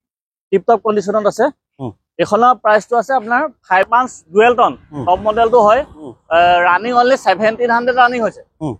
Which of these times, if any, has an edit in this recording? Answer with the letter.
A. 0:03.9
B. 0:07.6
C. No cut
A